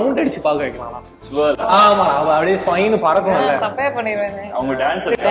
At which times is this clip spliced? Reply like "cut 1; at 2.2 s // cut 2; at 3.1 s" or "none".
none